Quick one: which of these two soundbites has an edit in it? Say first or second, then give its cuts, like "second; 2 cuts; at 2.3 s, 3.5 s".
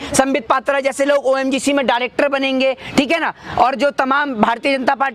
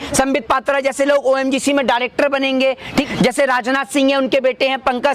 second; 1 cut; at 3.1 s